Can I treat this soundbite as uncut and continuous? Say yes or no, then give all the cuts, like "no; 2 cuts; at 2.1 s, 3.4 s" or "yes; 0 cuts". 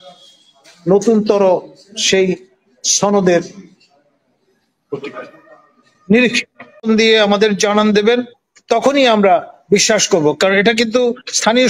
no; 1 cut; at 6.9 s